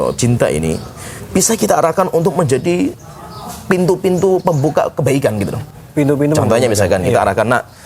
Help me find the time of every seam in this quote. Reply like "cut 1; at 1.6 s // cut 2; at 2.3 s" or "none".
none